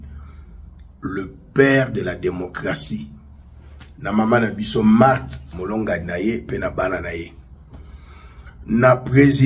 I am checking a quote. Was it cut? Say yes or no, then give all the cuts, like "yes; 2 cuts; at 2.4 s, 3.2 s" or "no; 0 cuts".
no; 0 cuts